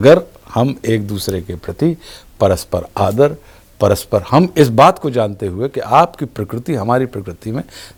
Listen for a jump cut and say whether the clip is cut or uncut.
uncut